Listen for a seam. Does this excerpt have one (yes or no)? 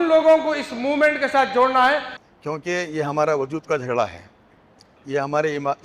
yes